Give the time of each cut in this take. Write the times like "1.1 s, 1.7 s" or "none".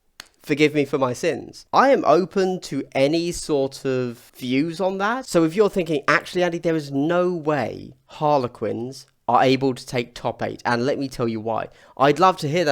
1.5 s